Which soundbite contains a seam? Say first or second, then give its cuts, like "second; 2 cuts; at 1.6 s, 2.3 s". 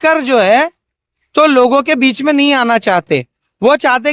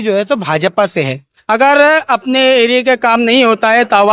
second; 1 cut; at 1.3 s